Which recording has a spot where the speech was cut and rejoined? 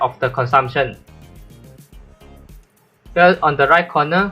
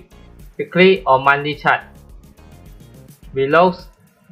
first; 2 cuts; at 1.5 s, 3.0 s

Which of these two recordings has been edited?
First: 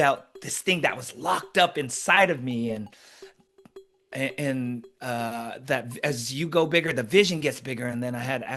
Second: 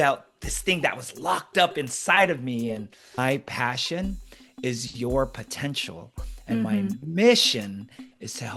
second; 1 cut; at 3.2 s

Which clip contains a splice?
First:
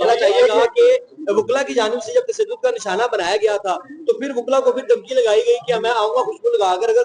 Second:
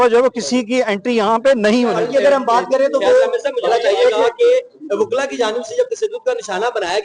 second; 1 cut; at 1.9 s

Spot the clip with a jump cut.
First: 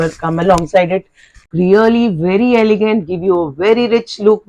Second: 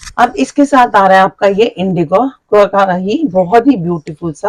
first; 1 cut; at 1.5 s

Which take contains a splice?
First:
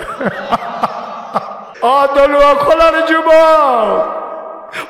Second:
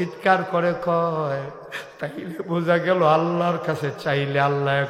first; 1 cut; at 1.7 s

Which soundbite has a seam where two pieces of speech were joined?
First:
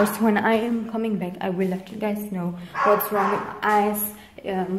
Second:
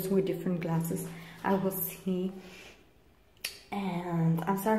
second; 1 cut; at 1.1 s

